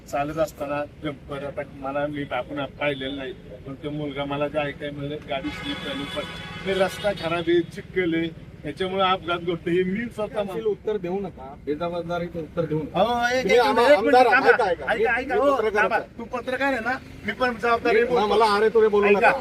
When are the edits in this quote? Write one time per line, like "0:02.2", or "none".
0:10.5